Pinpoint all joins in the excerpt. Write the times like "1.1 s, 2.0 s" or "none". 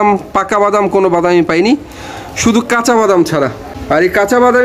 3.7 s